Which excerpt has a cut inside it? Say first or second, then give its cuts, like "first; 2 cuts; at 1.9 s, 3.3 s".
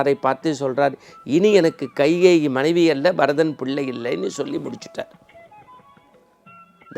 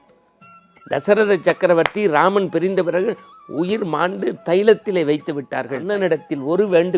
second; 1 cut; at 5.8 s